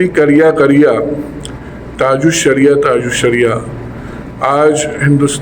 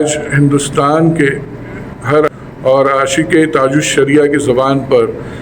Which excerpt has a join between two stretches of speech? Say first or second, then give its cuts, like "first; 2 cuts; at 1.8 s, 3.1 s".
second; 1 cut; at 2.3 s